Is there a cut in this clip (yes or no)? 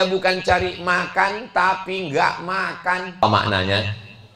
yes